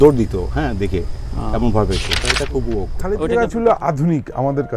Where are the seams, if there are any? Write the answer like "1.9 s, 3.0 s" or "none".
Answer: 2.8 s